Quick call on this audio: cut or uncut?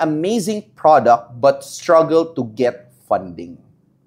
uncut